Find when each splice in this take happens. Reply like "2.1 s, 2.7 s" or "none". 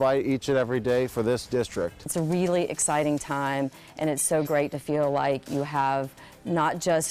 2.0 s